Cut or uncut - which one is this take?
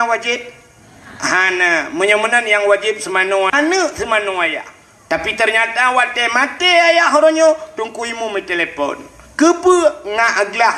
cut